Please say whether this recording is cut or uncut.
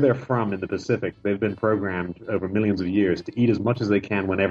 uncut